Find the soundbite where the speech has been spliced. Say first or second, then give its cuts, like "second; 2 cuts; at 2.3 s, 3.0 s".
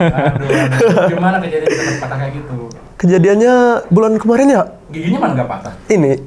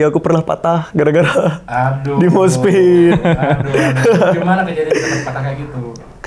first; 1 cut; at 5.0 s